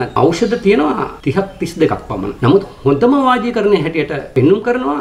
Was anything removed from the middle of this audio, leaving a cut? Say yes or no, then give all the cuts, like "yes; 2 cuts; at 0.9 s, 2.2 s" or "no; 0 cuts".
no; 0 cuts